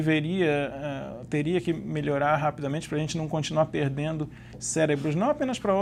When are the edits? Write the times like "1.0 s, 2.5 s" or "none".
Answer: none

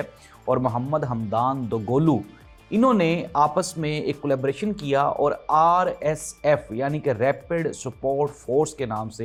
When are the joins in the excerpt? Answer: none

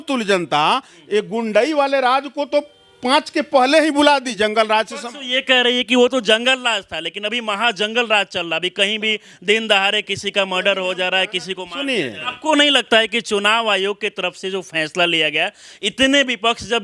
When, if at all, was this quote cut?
4.3 s, 12.3 s

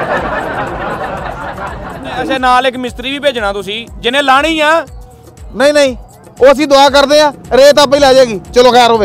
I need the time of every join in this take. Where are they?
2.3 s

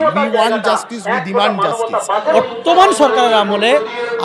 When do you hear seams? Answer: 2.3 s

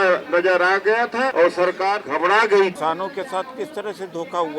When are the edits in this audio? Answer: 1.3 s, 2.1 s, 2.8 s

